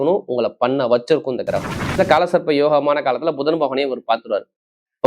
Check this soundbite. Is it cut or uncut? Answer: cut